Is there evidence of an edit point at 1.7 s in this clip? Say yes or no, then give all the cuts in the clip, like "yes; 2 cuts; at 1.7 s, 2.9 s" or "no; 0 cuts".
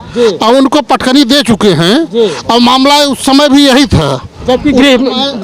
no; 0 cuts